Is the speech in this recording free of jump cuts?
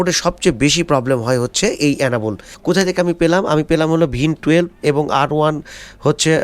no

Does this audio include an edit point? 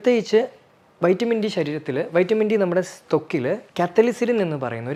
no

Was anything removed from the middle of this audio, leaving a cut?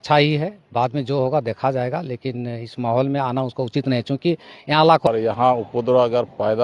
yes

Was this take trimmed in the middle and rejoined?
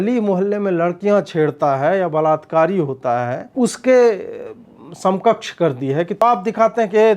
yes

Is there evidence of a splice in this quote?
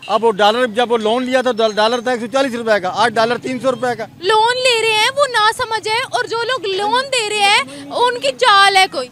no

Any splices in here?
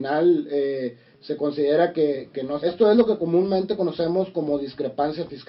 yes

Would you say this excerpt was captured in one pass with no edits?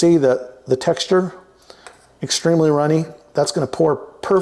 yes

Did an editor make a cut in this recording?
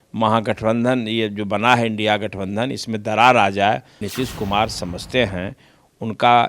yes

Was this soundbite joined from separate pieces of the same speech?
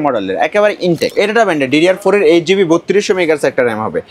yes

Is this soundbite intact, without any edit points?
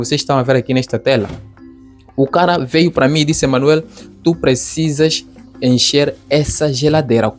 yes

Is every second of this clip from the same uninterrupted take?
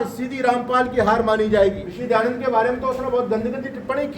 no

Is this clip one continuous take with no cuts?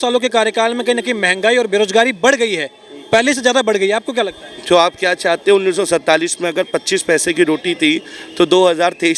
yes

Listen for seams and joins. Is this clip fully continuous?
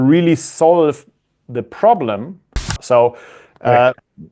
no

